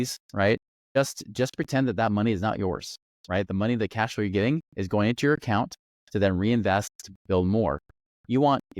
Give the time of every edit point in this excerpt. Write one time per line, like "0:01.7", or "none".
none